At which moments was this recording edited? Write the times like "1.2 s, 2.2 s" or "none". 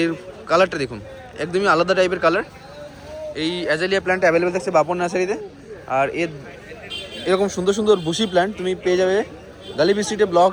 none